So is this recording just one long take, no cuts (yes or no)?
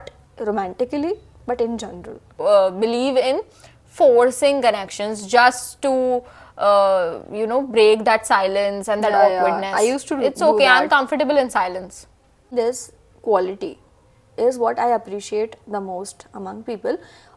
no